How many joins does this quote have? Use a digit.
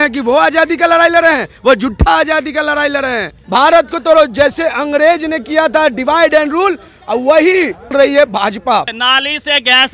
3